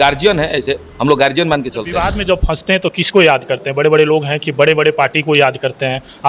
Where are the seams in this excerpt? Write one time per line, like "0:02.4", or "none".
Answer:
0:01.9